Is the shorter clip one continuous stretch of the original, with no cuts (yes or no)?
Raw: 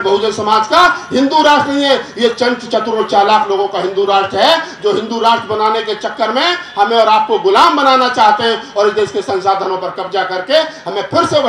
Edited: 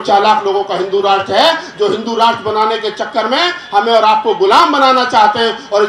yes